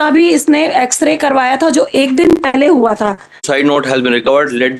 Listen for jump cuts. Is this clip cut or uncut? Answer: cut